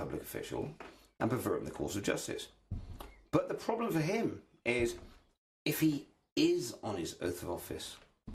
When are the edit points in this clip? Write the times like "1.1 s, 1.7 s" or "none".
6.1 s